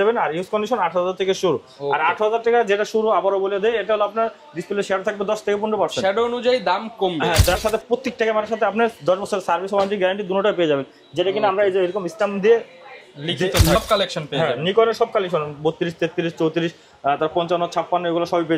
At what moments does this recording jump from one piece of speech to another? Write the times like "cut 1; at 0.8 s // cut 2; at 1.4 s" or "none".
cut 1; at 7.6 s // cut 2; at 13.8 s